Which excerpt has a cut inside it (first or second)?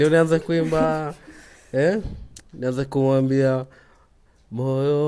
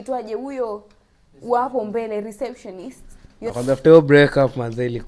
second